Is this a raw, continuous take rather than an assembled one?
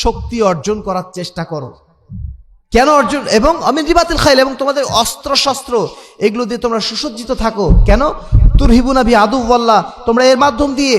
yes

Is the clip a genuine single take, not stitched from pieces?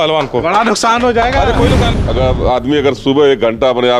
no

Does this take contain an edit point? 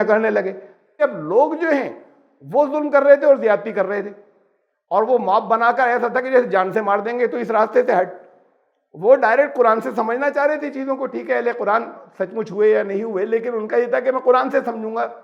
yes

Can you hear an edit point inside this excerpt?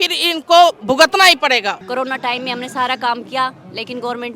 yes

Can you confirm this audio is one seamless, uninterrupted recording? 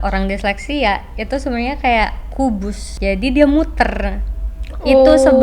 no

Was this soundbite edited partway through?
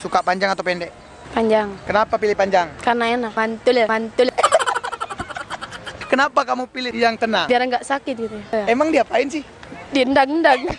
yes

